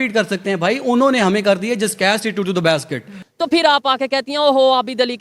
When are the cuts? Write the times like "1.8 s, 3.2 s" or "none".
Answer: 3.2 s